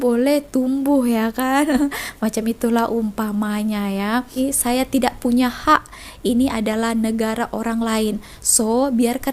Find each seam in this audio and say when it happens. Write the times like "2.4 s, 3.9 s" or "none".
4.3 s